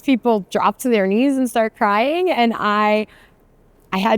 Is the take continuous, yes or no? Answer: yes